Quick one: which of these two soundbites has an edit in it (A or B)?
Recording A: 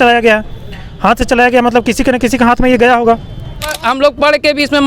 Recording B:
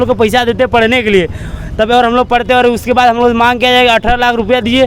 A